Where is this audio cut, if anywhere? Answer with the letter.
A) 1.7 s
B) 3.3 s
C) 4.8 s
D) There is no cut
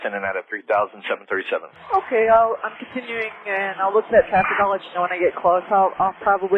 A